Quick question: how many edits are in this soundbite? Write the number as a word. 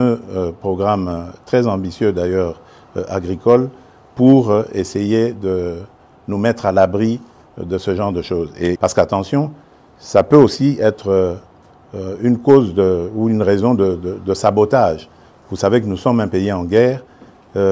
one